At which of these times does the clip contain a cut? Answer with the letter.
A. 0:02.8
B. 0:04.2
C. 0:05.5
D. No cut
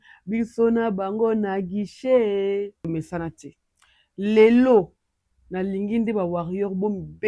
A